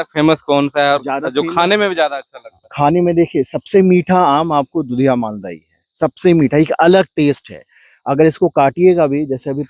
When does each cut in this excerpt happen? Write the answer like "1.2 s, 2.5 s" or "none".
none